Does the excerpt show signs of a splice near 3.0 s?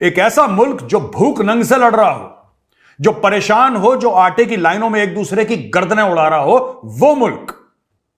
no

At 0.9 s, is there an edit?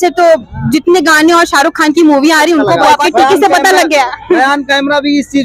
no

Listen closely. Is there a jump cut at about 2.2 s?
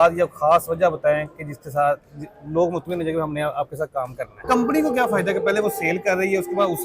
no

